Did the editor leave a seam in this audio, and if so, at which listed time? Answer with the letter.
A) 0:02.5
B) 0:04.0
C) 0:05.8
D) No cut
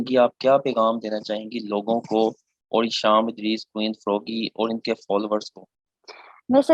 D